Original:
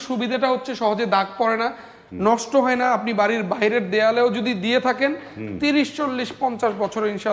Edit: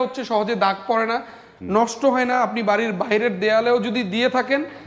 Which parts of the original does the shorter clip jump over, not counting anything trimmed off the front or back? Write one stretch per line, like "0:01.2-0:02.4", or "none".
none